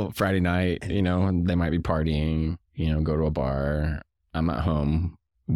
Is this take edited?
no; 0 cuts

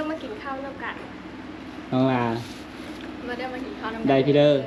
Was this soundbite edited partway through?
no; 0 cuts

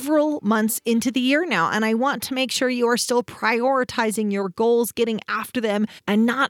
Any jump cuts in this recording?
no; 0 cuts

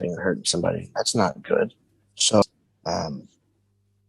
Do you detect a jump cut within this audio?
yes; 1 cut; at 2.4 s

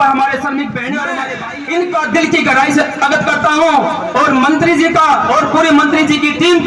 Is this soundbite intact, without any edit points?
no; 1 cut; at 1.2 s

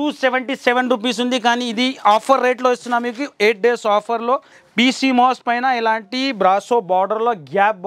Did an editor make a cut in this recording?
yes; 1 cut; at 4.6 s

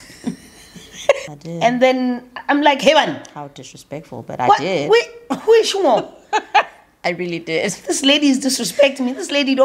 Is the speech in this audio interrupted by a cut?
yes; 1 cut; at 1.2 s

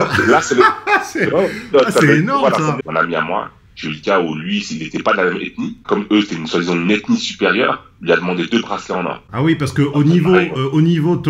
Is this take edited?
yes; 3 cuts; at 2.8 s, 5.8 s, 9.2 s

